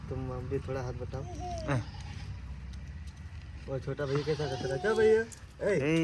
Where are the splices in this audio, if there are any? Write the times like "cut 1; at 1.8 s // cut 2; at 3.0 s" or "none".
none